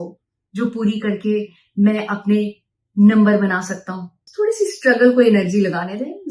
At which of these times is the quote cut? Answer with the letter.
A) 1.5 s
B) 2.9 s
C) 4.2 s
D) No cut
D